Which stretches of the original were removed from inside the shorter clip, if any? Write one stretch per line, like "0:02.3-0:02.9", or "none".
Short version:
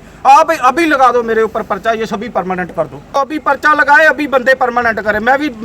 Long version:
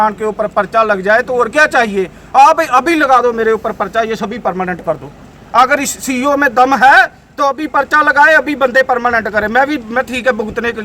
0:05.5-0:07.7